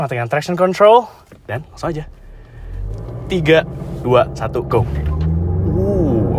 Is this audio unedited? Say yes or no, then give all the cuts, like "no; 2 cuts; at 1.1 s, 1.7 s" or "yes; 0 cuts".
yes; 0 cuts